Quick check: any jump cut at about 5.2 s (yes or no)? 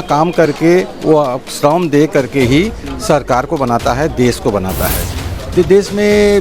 yes